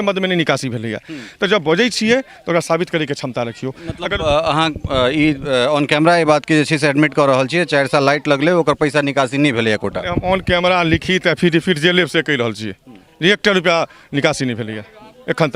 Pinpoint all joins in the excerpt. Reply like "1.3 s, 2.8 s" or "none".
none